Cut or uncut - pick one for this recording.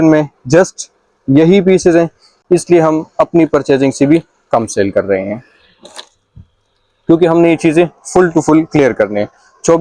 uncut